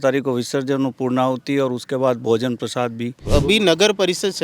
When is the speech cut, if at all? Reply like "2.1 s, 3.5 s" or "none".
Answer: 3.2 s